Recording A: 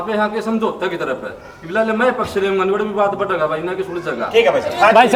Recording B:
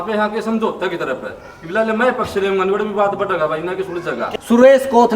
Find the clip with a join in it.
B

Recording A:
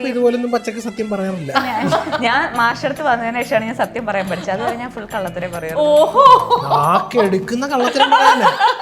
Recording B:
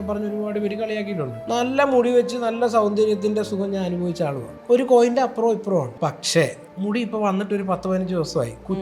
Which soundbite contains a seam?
B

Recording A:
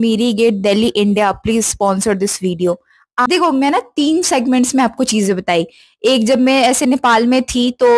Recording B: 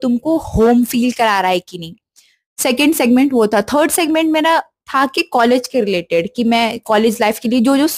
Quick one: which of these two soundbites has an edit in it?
A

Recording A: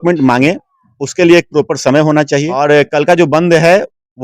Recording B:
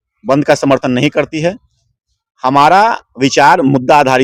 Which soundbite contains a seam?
A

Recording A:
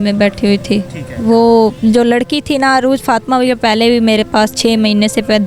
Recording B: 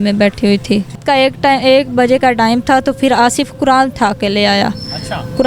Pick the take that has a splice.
B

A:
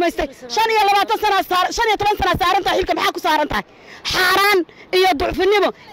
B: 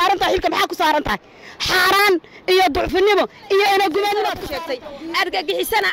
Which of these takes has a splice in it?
B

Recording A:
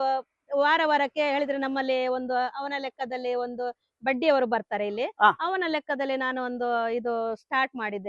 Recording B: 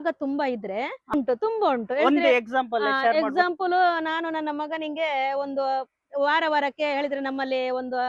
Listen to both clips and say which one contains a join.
B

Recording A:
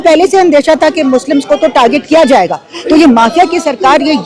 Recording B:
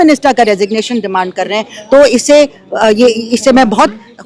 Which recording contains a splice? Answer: A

